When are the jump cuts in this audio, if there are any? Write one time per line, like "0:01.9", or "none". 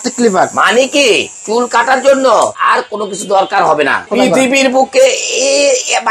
0:01.3
0:02.6
0:04.1